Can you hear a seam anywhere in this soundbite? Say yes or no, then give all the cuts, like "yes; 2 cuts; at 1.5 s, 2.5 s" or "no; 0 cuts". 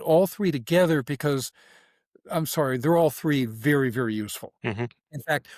yes; 1 cut; at 4.4 s